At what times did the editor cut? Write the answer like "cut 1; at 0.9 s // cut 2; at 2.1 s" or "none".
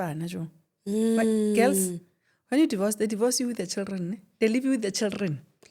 none